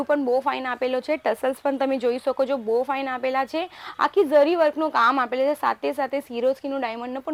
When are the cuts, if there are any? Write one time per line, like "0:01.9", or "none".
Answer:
none